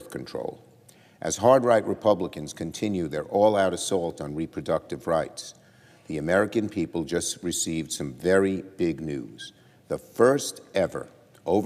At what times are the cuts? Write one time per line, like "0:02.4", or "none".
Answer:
0:02.6
0:07.8